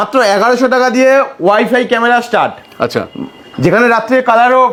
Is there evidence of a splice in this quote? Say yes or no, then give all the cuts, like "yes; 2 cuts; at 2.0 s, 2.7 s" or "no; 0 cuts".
no; 0 cuts